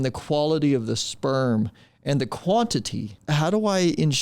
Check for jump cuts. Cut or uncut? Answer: cut